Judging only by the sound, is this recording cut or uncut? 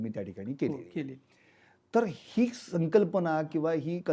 uncut